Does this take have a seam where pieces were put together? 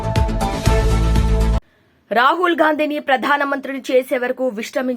no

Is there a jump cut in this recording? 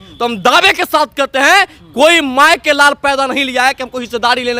no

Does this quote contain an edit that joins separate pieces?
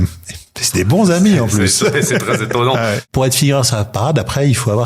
yes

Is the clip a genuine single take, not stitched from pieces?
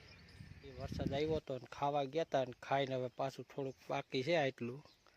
no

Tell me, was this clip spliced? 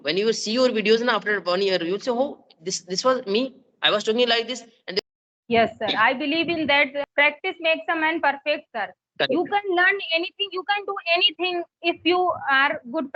yes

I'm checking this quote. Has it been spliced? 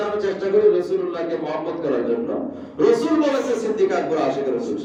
no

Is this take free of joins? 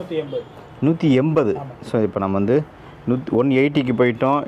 yes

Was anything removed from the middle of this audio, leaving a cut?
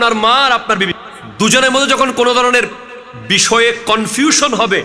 yes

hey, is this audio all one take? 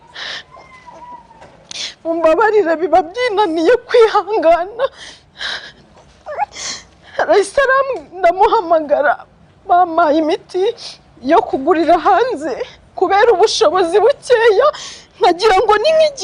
yes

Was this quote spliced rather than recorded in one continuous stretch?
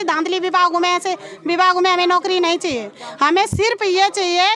no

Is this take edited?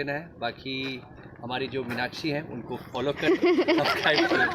no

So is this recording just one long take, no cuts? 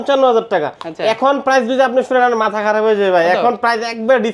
yes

